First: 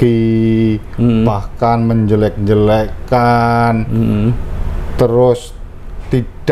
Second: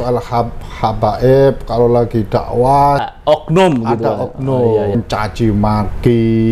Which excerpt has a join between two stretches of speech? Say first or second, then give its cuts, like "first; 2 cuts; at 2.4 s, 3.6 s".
second; 2 cuts; at 3.0 s, 5.0 s